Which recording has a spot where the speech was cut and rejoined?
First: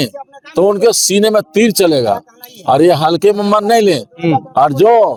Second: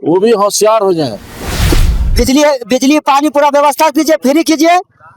second; 1 cut; at 1.7 s

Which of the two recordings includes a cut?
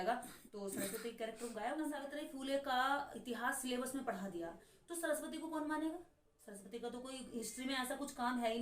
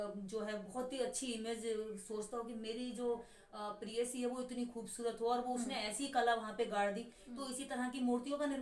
first; 1 cut; at 2.0 s

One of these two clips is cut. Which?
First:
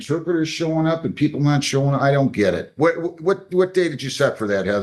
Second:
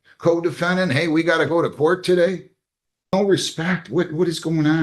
second; 1 cut; at 3.1 s

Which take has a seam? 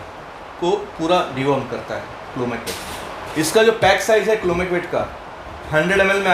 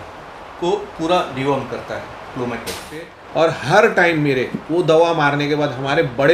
second; 1 cut; at 3.2 s

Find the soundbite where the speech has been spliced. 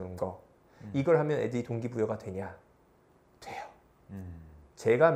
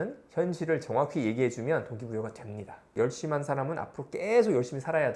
second; 1 cut; at 2.9 s

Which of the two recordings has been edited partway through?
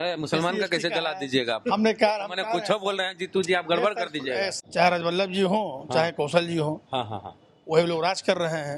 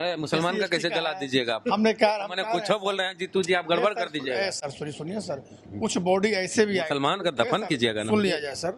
first; 1 cut; at 4.6 s

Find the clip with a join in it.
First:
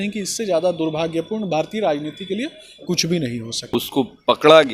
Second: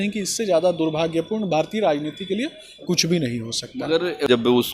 first; 1 cut; at 3.8 s

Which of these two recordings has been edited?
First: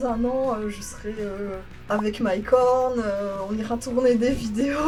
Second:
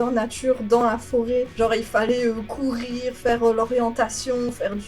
second; 1 cut; at 1.5 s

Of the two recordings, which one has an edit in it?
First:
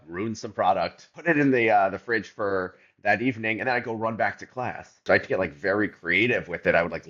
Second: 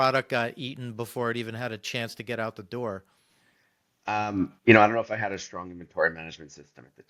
first; 2 cuts; at 1.1 s, 5.0 s

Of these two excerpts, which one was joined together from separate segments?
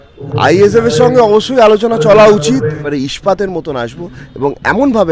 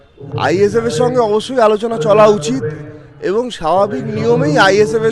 first; 1 cut; at 2.9 s

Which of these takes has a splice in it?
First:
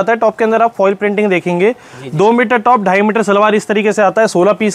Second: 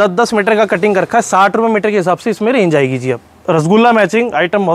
second; 1 cut; at 3.3 s

